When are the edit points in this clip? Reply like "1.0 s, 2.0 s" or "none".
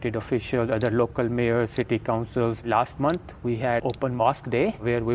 2.6 s, 3.8 s